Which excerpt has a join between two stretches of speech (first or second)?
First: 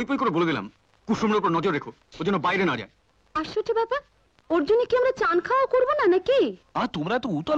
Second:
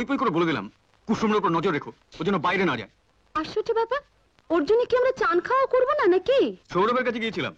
second